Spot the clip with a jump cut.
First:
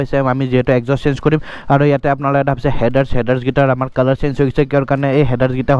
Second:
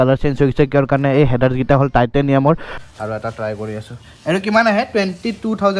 second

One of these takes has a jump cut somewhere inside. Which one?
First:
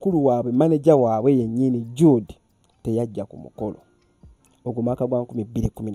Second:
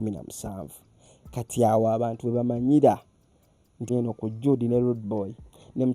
second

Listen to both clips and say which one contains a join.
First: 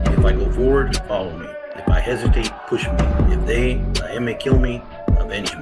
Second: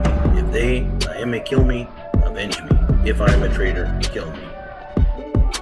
second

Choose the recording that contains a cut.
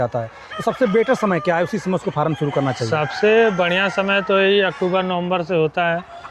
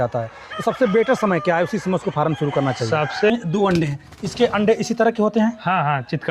second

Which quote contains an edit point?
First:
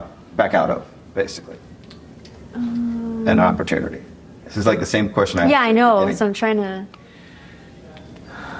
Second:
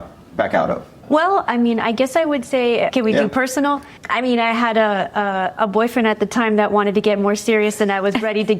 second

